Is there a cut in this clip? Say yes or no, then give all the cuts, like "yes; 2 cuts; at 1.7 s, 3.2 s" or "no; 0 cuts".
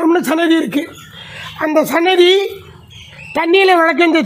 no; 0 cuts